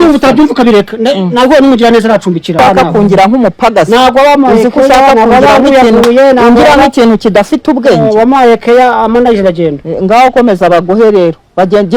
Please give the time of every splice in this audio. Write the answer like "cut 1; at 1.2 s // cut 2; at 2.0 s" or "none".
cut 1; at 2.6 s